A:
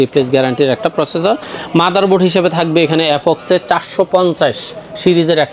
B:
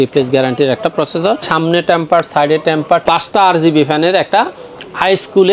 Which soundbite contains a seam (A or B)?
B